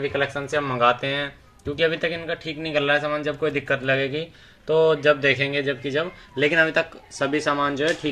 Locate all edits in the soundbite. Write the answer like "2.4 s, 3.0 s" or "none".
none

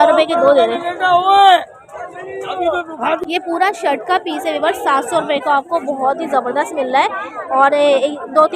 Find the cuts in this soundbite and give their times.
3.2 s

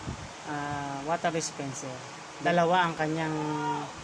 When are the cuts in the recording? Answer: 2.3 s

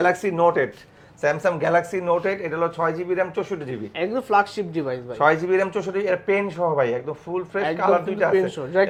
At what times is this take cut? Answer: none

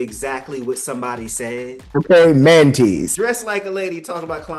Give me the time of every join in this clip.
1.8 s, 3.1 s

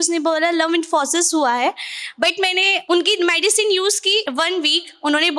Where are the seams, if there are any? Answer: 2.8 s, 4.3 s

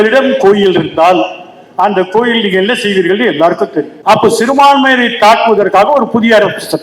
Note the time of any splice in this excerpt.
3.9 s

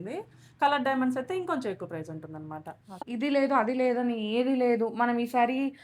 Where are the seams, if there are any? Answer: 3.0 s

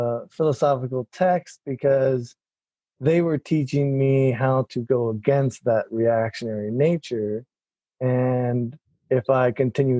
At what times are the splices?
none

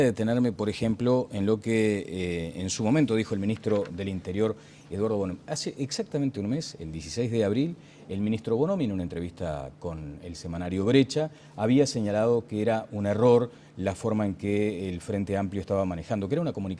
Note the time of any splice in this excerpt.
11.7 s

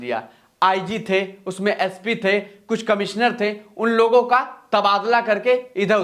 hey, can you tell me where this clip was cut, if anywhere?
none

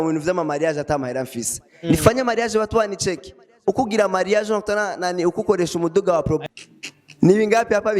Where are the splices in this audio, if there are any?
6.4 s

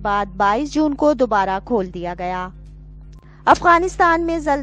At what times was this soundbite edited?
3.2 s

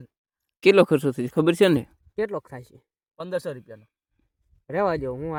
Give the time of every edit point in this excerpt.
none

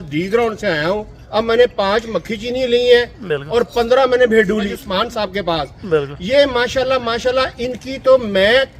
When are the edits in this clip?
1.1 s, 4.7 s

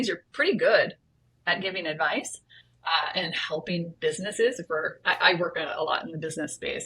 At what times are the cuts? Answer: none

